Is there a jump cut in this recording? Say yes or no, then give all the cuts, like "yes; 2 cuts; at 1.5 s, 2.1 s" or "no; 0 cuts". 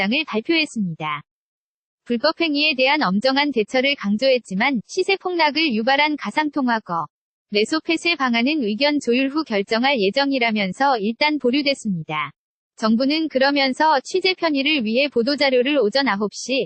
no; 0 cuts